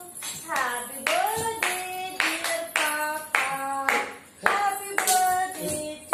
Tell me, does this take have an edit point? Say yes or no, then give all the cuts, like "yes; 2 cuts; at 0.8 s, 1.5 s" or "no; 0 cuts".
no; 0 cuts